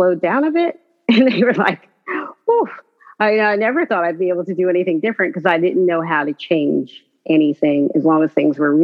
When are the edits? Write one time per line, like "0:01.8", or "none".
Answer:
none